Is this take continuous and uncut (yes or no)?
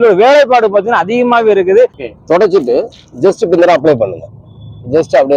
no